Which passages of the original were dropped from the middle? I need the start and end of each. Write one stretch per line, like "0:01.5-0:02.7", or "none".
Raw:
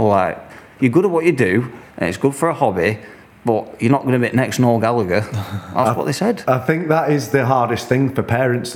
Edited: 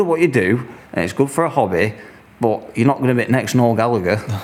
none